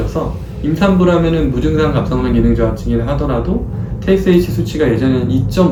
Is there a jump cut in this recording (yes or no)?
no